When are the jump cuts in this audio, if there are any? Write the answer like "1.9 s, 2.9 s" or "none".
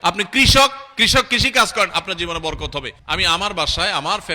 3.0 s